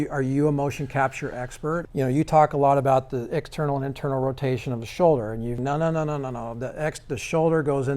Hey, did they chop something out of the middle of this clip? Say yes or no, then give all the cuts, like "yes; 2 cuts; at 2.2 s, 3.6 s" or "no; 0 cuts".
yes; 2 cuts; at 1.8 s, 5.6 s